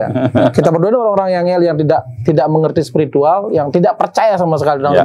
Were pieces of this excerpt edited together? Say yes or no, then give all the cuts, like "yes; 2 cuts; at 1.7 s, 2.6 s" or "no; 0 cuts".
no; 0 cuts